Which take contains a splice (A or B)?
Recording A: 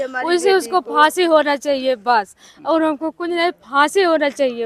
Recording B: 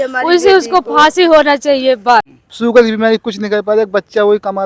B